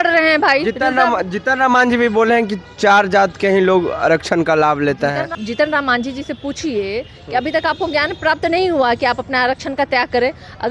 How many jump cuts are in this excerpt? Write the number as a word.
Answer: one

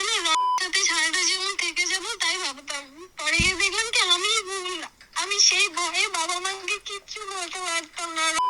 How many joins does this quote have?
zero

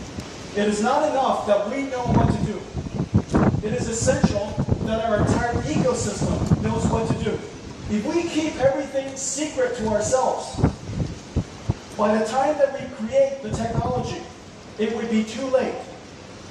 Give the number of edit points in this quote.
one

